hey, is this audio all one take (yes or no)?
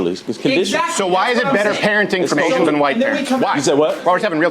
no